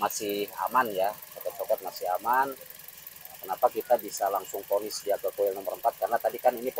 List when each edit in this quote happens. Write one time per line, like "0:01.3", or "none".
none